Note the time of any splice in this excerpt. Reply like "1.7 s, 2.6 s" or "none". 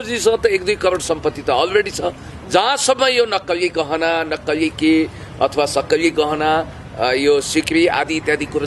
2.3 s